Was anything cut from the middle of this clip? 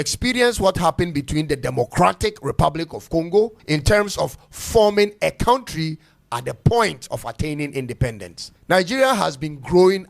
yes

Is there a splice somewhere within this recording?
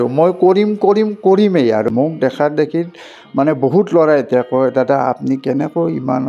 yes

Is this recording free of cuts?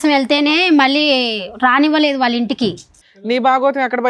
no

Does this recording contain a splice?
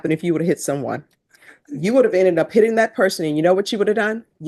no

